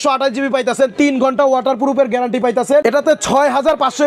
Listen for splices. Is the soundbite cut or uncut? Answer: cut